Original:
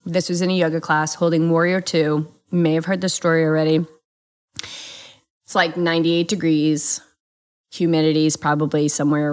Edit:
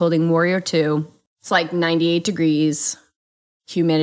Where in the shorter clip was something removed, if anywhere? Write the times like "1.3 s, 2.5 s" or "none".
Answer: 1.2 s